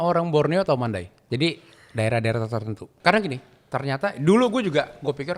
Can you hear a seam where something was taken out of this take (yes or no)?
yes